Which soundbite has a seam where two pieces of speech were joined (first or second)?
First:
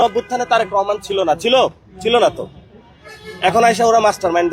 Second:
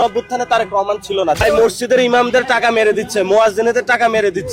second